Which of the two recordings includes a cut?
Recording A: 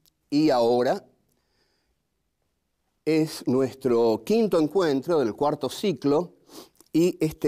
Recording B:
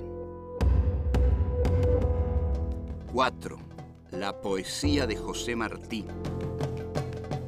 A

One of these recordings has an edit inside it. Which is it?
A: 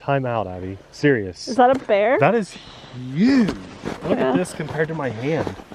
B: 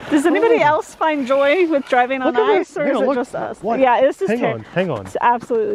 A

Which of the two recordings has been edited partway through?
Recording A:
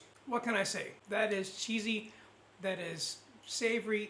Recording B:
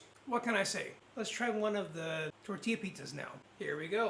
B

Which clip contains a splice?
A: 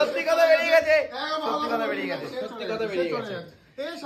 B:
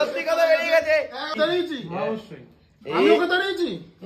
B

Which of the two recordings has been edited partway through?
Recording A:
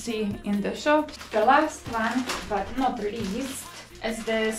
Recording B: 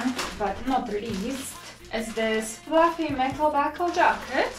A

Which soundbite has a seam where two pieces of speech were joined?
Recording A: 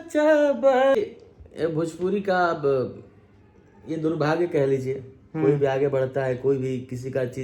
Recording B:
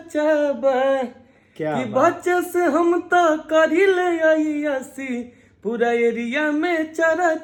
A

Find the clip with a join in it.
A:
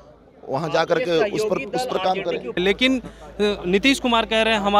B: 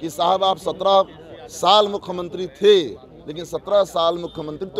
A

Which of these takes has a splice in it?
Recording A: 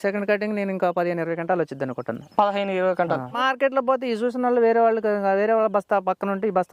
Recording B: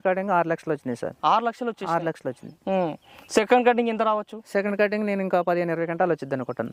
A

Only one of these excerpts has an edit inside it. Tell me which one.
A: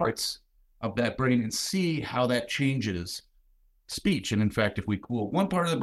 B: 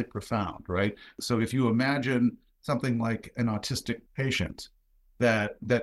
B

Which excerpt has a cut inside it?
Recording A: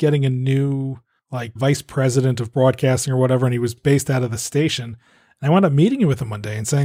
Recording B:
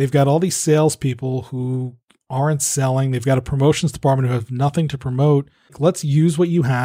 B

